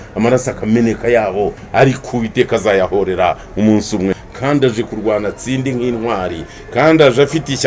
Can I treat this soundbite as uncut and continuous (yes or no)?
no